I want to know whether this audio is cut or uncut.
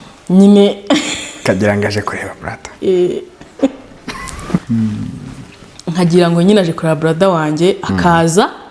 uncut